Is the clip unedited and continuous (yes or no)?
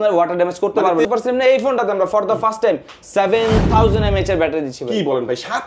no